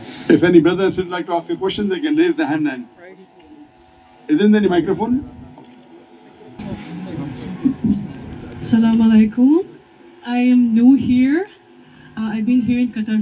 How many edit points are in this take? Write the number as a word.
one